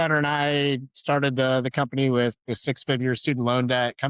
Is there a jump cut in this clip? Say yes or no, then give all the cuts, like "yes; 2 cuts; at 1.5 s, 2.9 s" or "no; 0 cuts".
no; 0 cuts